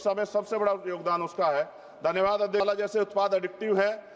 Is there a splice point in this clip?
yes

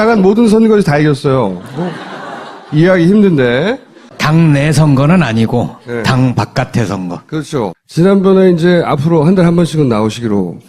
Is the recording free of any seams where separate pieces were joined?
no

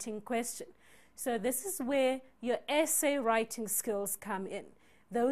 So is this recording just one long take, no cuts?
yes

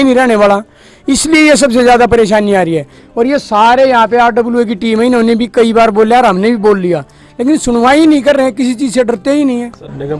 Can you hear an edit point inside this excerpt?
no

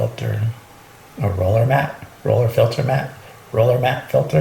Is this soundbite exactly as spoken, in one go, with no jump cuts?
yes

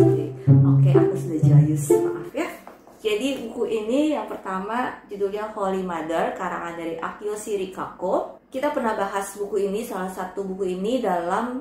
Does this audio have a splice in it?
no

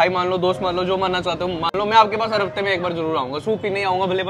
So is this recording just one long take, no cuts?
yes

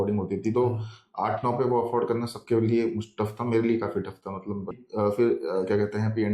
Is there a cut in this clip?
yes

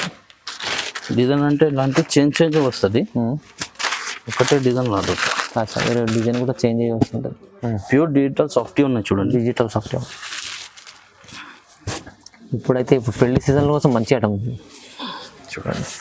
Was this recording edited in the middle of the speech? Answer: yes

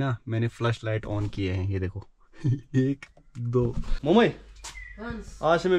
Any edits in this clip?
yes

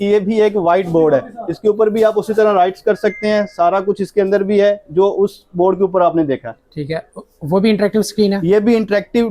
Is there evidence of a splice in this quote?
no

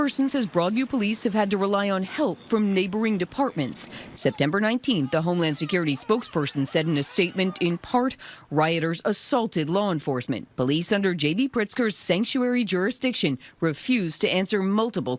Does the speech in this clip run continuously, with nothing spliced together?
yes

